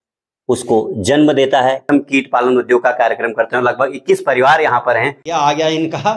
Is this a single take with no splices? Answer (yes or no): no